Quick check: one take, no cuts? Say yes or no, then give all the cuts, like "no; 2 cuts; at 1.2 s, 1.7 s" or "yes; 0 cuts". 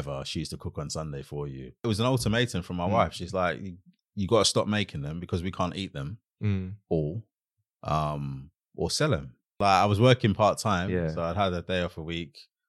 no; 2 cuts; at 1.8 s, 9.6 s